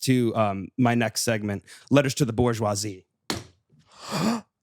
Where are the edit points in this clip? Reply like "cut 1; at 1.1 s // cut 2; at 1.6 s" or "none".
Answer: cut 1; at 3.6 s